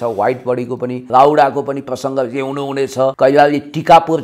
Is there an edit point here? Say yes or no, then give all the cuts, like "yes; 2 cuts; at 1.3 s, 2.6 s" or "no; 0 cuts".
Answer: yes; 2 cuts; at 1.0 s, 3.1 s